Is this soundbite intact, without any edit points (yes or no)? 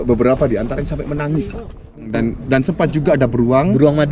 no